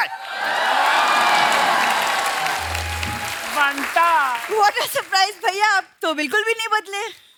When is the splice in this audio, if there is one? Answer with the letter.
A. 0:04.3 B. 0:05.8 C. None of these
C